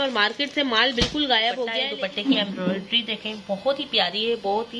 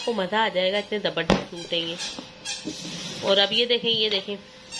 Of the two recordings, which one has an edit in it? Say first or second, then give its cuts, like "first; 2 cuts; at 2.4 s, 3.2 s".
first; 1 cut; at 1.8 s